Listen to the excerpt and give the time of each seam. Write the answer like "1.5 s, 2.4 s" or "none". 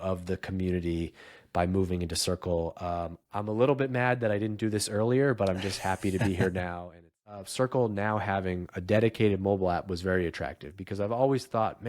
7.4 s

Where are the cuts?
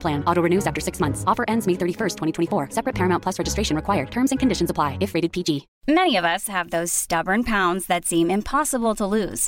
5.7 s

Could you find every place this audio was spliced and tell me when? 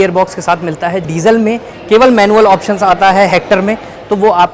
1.1 s

